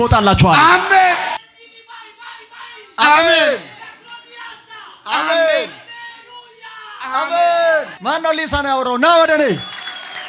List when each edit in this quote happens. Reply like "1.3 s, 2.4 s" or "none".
1.4 s, 7.9 s